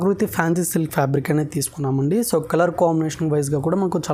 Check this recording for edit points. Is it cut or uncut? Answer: uncut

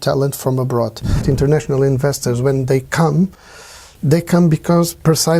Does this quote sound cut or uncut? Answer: cut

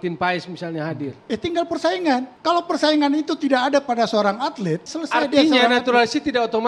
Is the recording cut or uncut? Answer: uncut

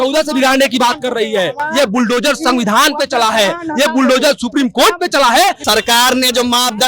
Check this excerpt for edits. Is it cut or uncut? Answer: cut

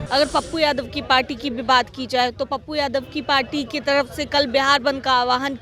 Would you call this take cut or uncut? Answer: uncut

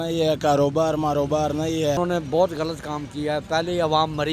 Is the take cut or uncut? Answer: cut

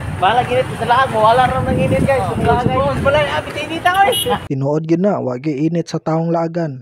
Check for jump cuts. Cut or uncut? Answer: cut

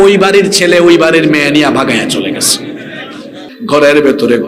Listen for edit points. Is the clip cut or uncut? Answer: cut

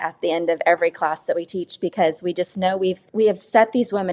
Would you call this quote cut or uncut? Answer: cut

